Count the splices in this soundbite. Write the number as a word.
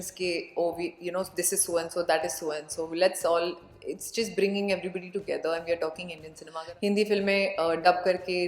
one